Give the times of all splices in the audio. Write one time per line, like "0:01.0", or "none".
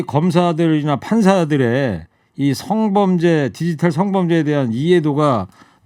none